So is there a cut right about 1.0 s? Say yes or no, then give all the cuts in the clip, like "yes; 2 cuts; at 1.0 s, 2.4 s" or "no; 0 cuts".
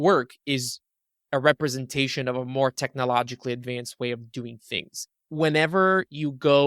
no; 1 cut; at 5.2 s